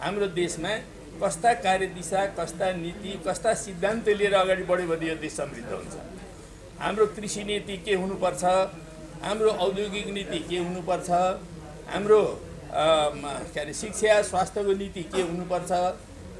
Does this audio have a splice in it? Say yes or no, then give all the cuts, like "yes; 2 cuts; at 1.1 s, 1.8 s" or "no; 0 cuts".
no; 0 cuts